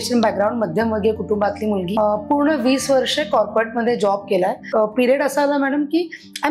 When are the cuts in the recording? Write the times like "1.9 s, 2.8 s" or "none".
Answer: 1.9 s, 4.7 s